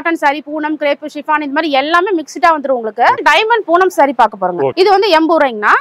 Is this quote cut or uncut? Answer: cut